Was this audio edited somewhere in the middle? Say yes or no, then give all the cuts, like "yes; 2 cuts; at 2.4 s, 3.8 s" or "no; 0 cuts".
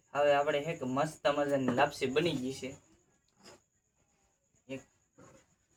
no; 0 cuts